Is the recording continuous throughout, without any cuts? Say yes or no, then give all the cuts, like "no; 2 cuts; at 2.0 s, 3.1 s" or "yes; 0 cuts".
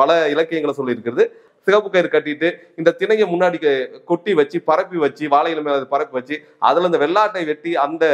no; 1 cut; at 1.4 s